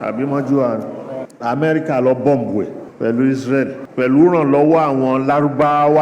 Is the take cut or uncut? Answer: cut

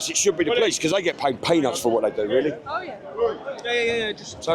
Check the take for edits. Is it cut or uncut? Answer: uncut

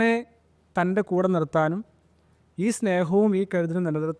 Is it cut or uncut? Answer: uncut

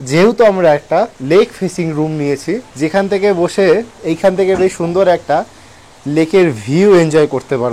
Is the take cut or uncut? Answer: cut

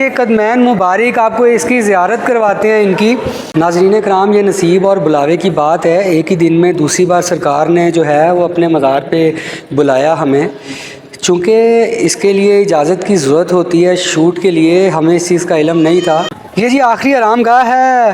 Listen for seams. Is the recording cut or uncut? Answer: cut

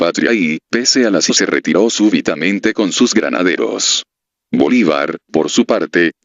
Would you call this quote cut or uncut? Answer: uncut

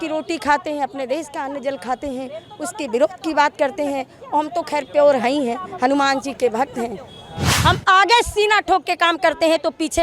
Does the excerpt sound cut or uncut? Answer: cut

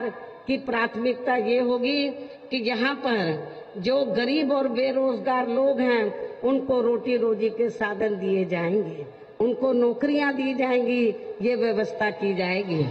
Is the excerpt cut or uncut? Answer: uncut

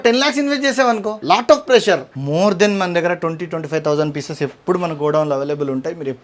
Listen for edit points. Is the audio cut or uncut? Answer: cut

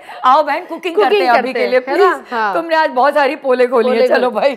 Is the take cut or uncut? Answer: uncut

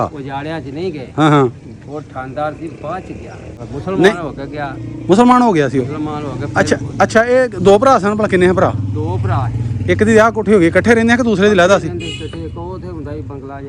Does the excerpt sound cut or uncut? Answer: uncut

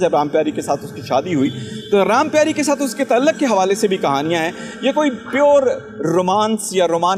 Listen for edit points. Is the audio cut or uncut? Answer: uncut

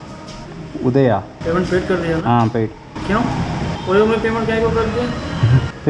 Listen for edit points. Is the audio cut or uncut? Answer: cut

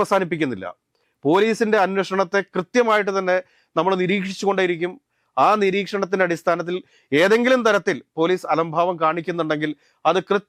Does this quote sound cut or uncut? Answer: uncut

